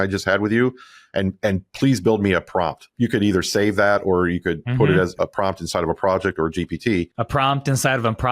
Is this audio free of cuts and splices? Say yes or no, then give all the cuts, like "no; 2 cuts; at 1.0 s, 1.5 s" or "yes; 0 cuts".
no; 3 cuts; at 2.9 s, 5.1 s, 7.5 s